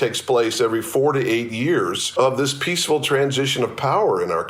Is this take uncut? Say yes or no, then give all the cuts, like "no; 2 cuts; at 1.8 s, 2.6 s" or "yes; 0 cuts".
no; 1 cut; at 2.0 s